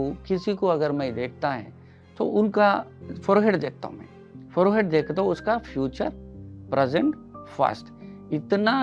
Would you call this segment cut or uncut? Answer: uncut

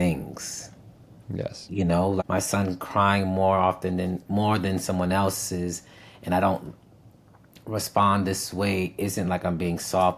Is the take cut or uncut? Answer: cut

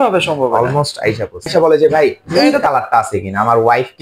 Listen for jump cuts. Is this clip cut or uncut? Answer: cut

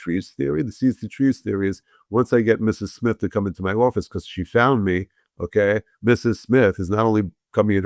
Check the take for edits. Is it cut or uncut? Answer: uncut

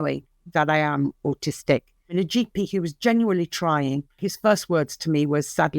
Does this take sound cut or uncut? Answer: cut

